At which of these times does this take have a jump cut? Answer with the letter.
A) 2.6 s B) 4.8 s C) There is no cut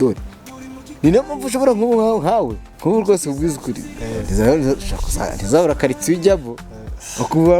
A